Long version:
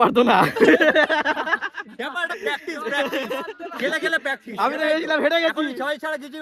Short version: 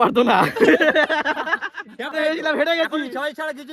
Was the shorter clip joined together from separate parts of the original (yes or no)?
yes